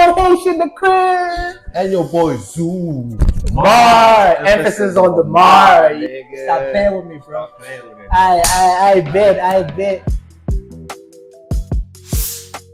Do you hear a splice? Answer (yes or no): no